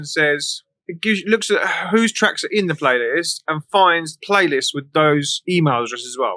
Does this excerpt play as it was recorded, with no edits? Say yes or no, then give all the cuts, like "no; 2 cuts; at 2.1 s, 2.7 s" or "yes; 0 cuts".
no; 2 cuts; at 4.1 s, 5.3 s